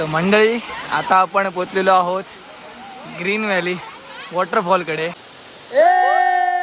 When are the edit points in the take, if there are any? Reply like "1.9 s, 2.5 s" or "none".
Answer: 5.2 s

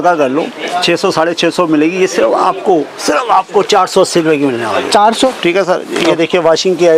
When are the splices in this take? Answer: 5.4 s

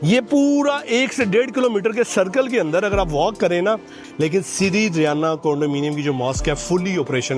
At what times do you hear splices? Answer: 3.9 s

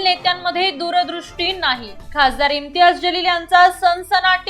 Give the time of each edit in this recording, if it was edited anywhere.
none

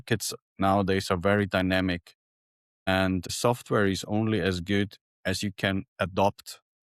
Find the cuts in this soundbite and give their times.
none

